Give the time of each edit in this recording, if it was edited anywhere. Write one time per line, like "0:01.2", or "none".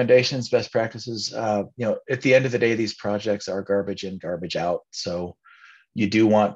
none